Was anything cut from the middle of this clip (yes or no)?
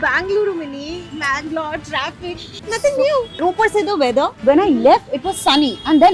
yes